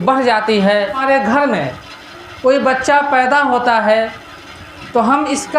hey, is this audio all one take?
no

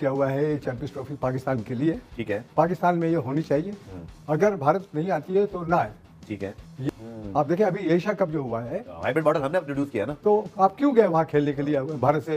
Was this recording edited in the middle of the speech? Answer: no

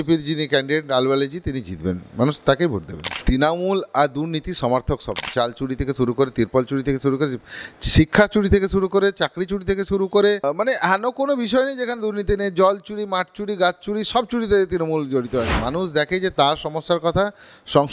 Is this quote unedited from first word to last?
no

